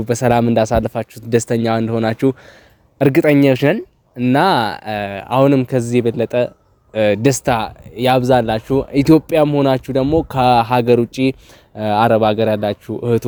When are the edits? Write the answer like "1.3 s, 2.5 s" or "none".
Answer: none

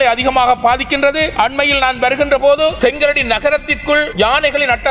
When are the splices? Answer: 1.3 s, 2.8 s, 4.1 s

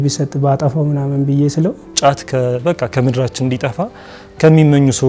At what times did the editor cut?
1.9 s

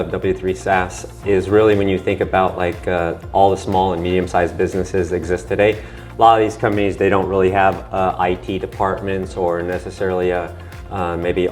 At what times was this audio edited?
none

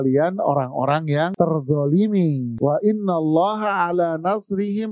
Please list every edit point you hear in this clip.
1.3 s, 2.5 s

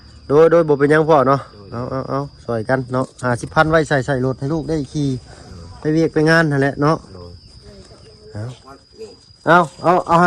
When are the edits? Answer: 8.9 s

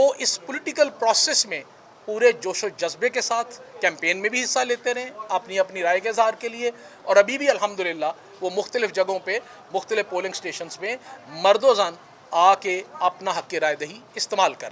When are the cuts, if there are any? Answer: none

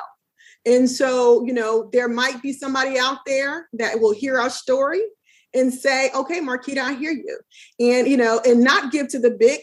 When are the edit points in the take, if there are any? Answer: none

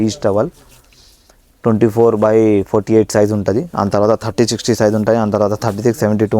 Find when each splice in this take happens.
none

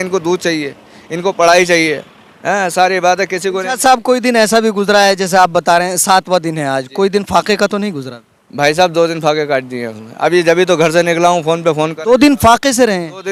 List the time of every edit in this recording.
none

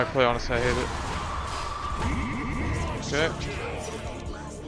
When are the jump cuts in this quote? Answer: none

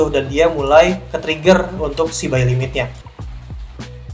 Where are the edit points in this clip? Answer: 3.0 s

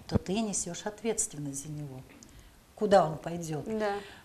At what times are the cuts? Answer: none

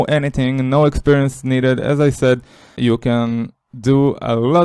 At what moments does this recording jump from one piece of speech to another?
2.7 s

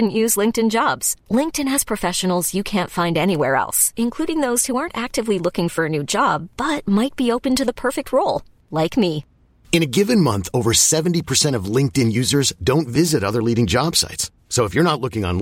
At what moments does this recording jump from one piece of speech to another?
none

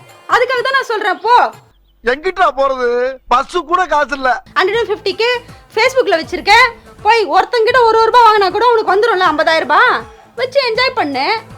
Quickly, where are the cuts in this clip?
4.4 s

